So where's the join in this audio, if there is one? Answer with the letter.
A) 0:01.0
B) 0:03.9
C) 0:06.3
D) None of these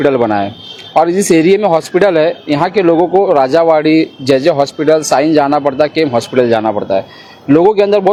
D